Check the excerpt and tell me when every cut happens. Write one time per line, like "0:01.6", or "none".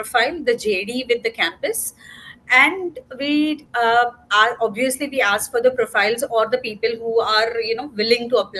none